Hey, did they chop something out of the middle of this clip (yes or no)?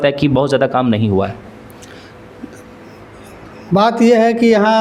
no